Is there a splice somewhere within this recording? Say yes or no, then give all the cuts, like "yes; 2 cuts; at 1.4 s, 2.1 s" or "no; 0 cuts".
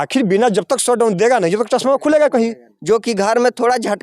yes; 1 cut; at 2.7 s